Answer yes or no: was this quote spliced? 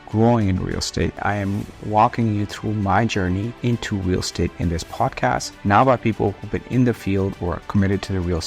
yes